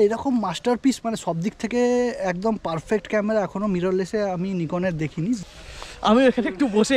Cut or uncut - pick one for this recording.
cut